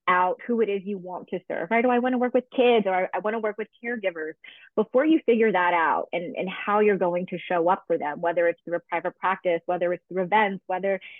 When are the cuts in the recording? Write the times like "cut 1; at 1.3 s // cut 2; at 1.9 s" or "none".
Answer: none